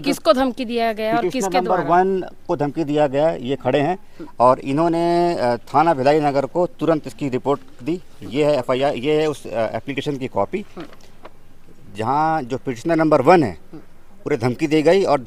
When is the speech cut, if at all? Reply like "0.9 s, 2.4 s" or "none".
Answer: none

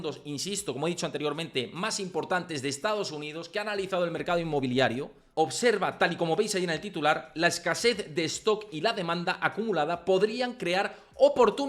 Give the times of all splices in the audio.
5.2 s

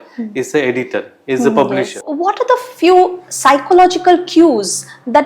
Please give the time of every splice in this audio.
2.0 s

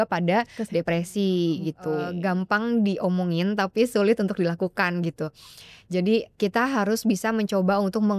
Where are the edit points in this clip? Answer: 2.1 s

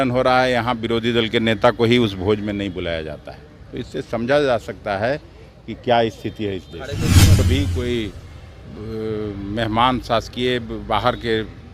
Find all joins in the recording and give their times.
7.3 s

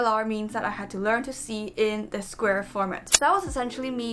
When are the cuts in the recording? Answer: 3.1 s

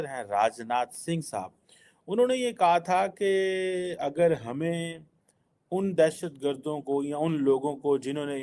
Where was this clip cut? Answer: none

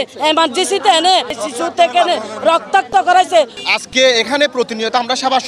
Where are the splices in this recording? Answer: 1.4 s, 3.6 s

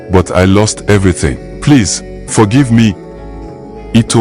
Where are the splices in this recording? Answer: 1.5 s, 3.3 s

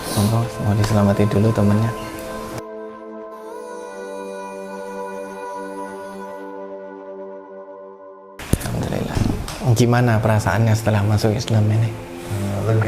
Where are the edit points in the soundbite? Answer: 9.2 s

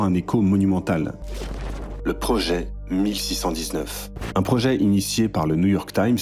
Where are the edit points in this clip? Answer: 1.2 s

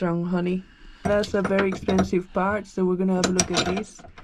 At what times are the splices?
1.0 s

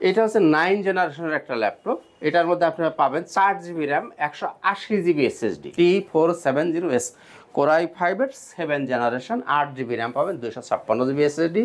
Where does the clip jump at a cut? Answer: 5.7 s

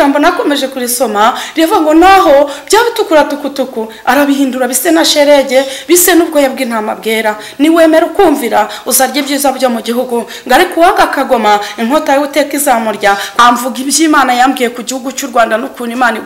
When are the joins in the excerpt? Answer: 13.4 s

